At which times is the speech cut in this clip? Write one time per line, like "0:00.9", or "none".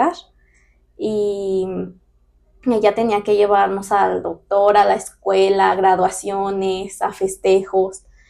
none